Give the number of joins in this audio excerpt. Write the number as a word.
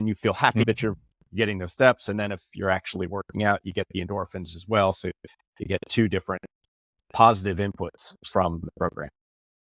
one